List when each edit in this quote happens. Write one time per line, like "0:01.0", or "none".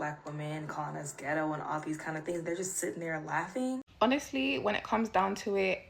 0:03.9